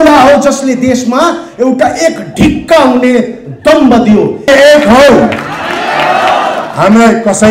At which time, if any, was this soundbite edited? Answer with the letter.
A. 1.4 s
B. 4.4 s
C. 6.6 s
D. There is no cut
B